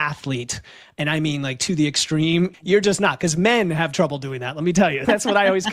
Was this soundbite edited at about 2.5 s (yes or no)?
yes